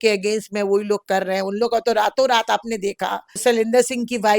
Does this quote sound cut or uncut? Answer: cut